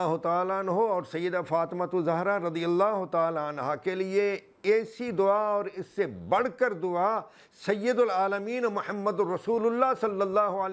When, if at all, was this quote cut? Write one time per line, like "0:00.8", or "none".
none